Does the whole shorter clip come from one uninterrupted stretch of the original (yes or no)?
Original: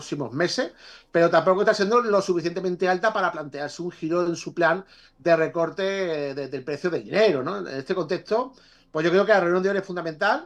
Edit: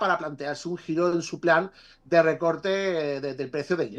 yes